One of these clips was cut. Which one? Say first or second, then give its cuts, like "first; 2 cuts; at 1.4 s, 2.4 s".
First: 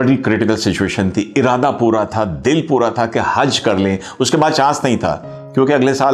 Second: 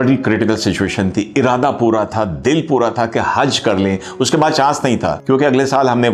second; 1 cut; at 5.2 s